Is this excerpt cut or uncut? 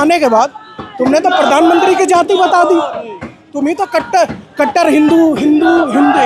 uncut